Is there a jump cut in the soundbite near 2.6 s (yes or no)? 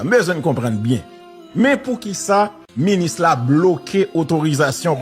yes